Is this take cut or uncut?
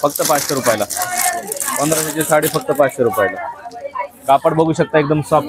uncut